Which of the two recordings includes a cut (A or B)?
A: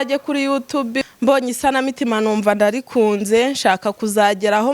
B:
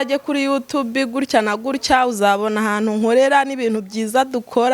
A